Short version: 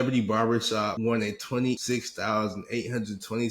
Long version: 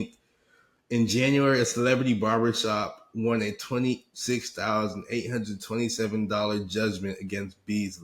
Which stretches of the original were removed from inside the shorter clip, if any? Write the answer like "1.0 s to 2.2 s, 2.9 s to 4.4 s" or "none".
2.9 s to 3.1 s, 4.0 s to 4.2 s